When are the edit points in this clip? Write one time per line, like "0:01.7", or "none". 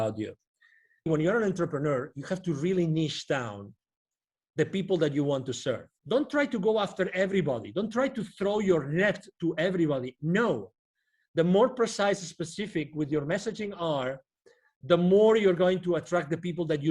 0:01.1
0:05.9